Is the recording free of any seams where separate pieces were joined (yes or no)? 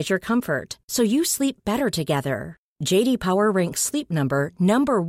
yes